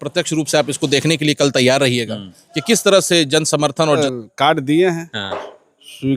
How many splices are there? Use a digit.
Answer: 1